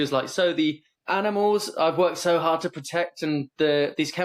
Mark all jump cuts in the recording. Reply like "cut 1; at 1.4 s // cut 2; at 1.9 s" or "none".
cut 1; at 0.9 s